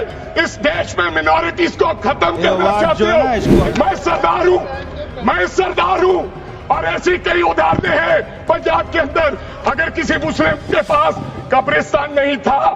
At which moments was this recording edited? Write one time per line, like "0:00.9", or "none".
0:03.5